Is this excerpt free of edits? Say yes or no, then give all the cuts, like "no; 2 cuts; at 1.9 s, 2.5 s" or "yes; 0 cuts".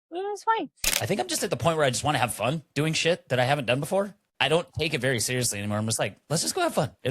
no; 1 cut; at 0.9 s